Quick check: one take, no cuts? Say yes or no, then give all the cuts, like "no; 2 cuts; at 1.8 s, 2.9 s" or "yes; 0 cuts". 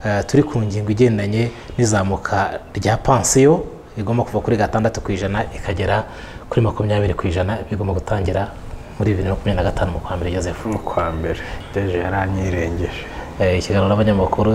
no; 1 cut; at 11.5 s